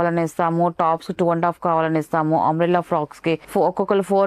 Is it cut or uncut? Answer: uncut